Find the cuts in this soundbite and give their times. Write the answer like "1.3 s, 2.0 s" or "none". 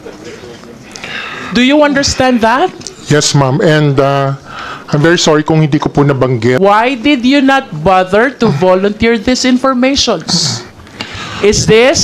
6.6 s